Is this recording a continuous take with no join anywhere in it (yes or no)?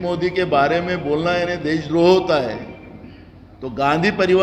yes